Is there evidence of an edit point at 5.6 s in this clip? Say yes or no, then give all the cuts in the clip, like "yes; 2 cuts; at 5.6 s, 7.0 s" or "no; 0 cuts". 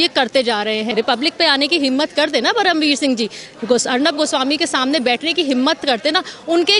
no; 1 cut; at 0.9 s